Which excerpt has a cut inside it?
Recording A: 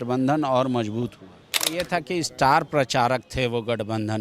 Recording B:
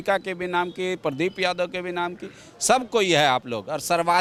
A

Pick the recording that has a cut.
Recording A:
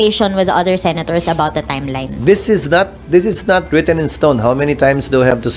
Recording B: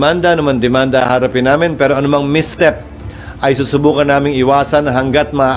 A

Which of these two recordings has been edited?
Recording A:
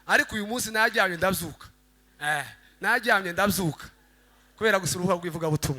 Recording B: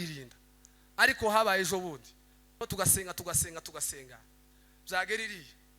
B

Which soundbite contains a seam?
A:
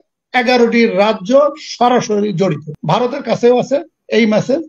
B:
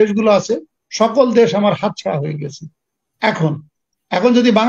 A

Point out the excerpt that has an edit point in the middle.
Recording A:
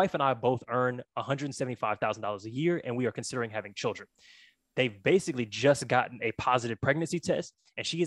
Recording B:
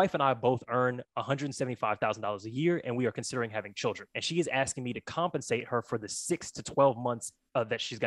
B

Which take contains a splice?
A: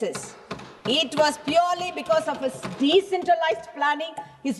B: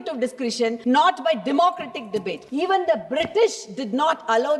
B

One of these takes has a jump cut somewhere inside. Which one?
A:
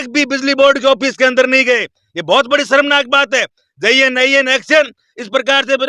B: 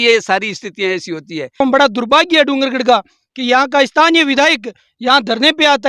B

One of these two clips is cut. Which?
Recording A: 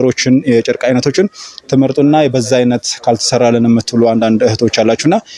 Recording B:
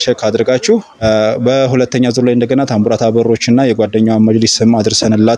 B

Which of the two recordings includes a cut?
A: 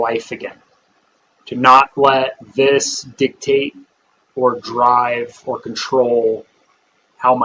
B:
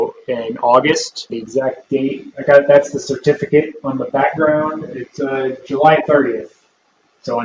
B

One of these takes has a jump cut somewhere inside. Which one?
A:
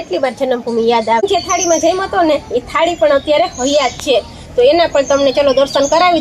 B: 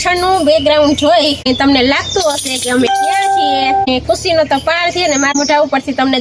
A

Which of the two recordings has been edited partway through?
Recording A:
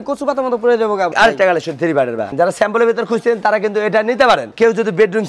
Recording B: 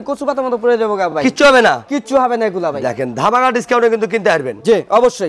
A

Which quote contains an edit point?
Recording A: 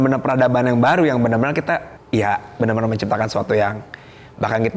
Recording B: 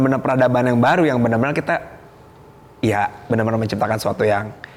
A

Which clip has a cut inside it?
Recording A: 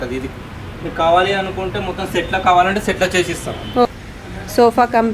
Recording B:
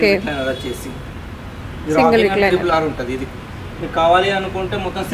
A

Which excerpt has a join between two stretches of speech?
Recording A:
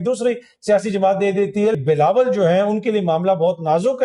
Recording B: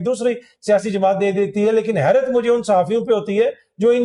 A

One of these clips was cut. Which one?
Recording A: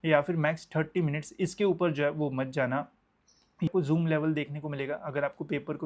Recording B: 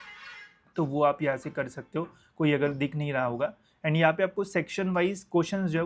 A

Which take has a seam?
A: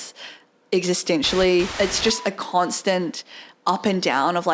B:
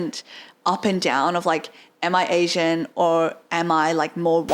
A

